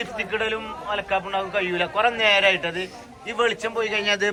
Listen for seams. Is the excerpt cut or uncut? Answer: uncut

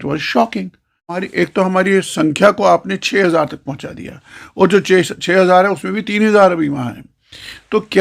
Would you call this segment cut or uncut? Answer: cut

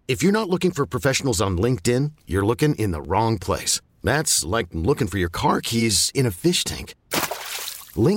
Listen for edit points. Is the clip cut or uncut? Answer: uncut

